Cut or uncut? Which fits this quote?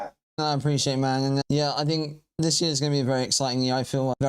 uncut